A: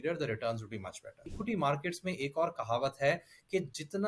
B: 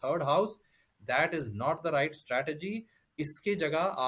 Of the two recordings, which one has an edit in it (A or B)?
A